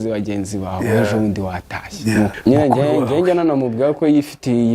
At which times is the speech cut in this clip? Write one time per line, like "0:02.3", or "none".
0:02.3